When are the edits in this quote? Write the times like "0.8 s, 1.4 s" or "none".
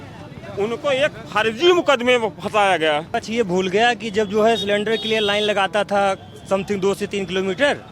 3.1 s